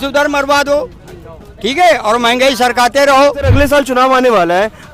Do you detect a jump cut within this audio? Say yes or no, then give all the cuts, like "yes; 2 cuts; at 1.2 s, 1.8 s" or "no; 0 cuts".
yes; 1 cut; at 3.5 s